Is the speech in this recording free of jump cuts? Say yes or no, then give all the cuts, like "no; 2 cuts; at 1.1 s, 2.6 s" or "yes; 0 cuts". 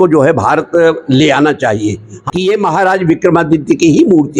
no; 1 cut; at 2.2 s